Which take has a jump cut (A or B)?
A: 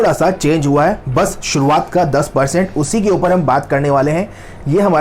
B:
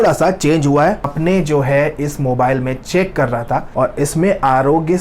B